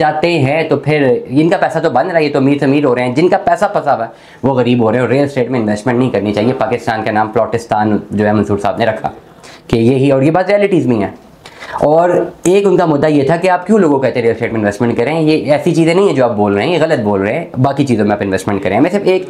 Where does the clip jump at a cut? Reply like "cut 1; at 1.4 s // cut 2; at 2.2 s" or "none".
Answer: none